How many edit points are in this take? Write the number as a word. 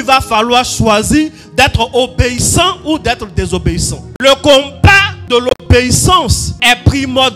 three